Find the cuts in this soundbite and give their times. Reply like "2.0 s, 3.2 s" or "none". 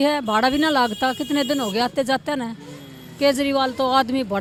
none